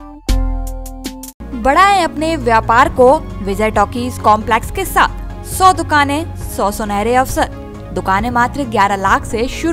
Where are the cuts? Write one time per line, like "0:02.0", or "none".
none